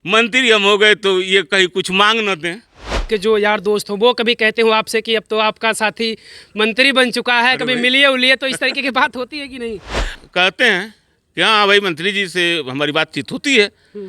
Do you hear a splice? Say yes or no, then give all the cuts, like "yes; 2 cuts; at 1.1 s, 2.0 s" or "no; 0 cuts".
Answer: yes; 2 cuts; at 3.0 s, 10.1 s